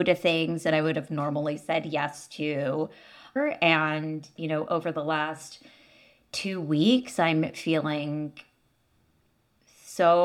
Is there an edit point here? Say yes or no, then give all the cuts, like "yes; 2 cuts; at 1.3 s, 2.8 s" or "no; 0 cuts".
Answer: yes; 1 cut; at 3.3 s